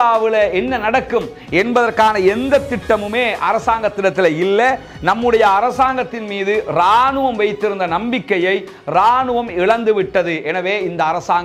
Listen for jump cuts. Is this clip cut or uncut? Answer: uncut